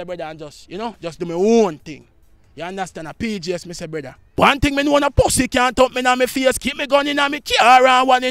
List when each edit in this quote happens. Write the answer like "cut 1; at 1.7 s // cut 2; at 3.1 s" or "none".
cut 1; at 4.3 s